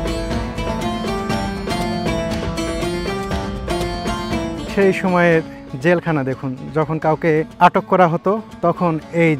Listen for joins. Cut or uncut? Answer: cut